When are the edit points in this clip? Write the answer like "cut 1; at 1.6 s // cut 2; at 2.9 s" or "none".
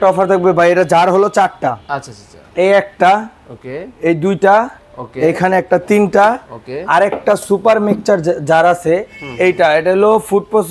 none

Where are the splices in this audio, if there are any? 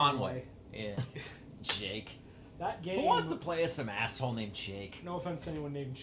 cut 1; at 1.0 s

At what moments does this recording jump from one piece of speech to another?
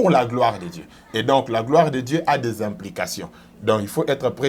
none

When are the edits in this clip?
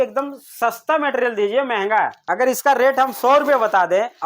cut 1; at 2.2 s

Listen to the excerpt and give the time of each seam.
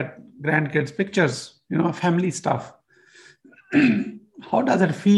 none

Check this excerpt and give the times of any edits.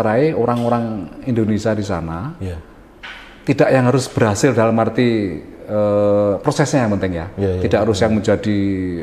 none

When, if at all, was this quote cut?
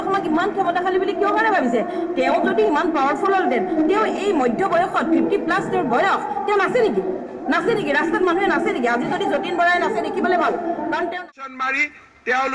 cut 1; at 11.1 s

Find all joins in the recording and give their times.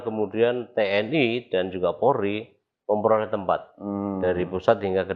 none

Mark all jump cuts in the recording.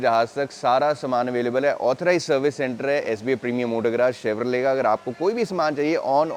none

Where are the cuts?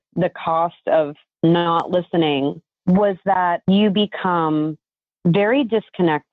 cut 1; at 1.2 s // cut 2; at 2.7 s // cut 3; at 3.6 s

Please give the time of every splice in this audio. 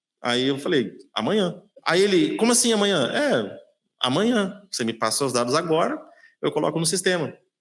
cut 1; at 1.7 s

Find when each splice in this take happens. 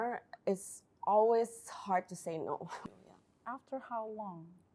cut 1; at 2.8 s

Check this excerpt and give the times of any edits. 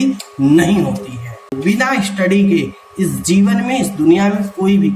cut 1; at 1.5 s

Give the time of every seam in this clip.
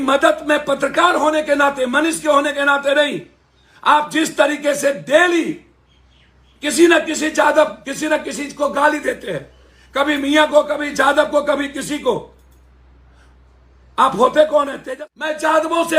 cut 1; at 14.8 s

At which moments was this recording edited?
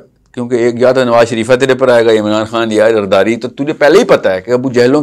none

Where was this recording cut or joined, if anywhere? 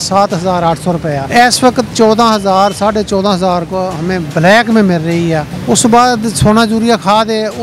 cut 1; at 1.2 s // cut 2; at 5.5 s

